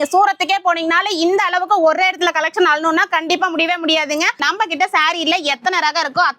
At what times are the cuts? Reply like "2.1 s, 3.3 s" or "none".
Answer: 4.3 s